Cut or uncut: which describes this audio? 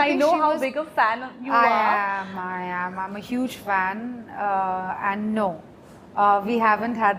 uncut